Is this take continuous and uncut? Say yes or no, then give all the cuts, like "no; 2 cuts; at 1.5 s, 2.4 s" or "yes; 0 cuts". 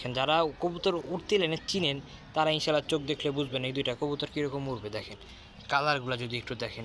yes; 0 cuts